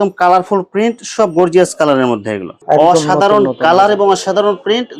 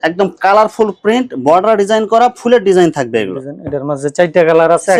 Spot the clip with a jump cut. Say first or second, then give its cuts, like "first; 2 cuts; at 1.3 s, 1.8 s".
first; 1 cut; at 2.6 s